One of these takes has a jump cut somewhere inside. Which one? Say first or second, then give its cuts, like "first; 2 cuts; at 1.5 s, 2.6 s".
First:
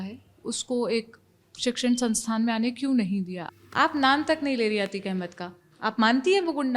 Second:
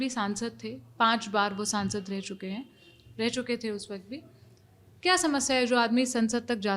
first; 1 cut; at 3.4 s